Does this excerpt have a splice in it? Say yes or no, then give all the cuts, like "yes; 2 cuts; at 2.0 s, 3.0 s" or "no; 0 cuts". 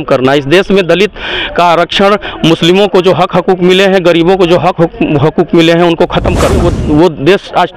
yes; 1 cut; at 6.7 s